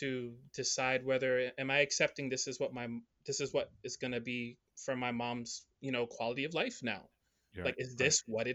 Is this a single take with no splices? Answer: yes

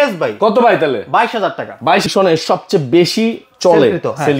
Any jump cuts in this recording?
yes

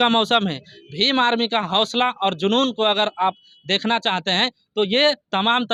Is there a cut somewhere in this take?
no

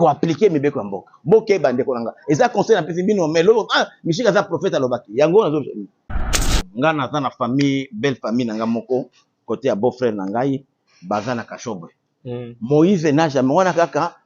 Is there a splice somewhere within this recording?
yes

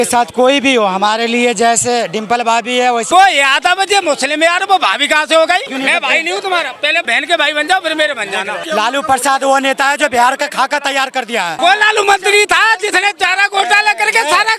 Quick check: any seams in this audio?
yes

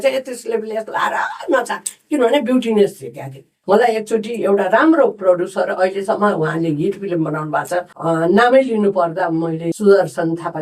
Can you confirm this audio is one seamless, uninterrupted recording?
no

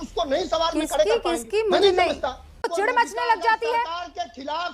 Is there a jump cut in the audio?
yes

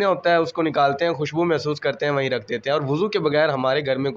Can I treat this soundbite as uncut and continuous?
yes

